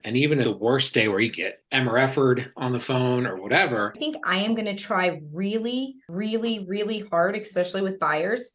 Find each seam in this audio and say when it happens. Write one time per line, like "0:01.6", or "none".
0:04.0